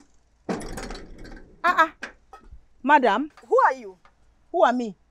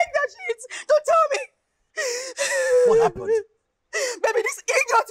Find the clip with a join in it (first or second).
first